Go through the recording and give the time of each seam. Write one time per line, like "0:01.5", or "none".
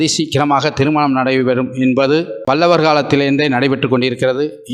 0:02.3